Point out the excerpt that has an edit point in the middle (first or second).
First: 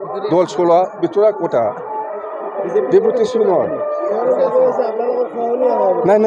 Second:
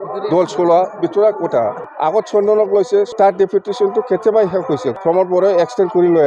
second